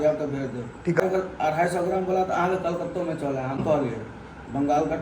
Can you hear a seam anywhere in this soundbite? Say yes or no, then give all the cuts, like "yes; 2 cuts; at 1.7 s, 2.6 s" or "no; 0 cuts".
yes; 2 cuts; at 1.0 s, 3.6 s